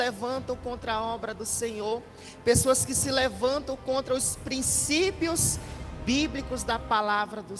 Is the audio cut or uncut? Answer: uncut